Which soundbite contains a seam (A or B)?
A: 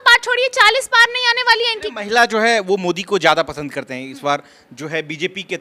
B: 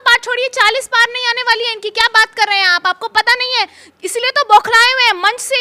A